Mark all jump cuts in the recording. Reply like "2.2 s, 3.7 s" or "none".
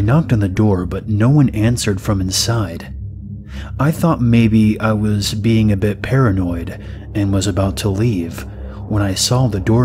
none